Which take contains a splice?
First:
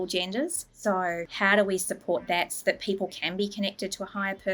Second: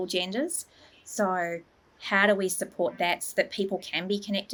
first; 1 cut; at 1.0 s

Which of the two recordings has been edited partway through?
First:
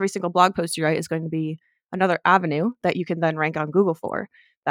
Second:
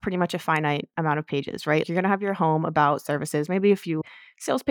second; 2 cuts; at 1.9 s, 4.0 s

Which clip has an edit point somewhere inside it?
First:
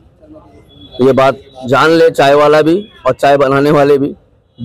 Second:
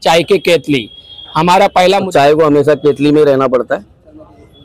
second; 1 cut; at 2.1 s

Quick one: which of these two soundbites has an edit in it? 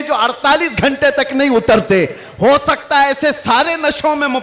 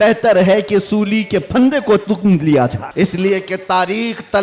second; 1 cut; at 2.8 s

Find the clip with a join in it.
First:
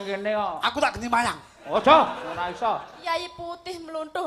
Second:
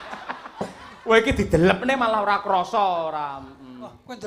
first; 1 cut; at 2.9 s

